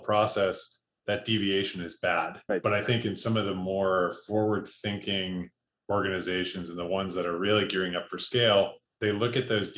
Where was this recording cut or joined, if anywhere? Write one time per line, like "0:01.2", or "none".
0:02.4
0:08.8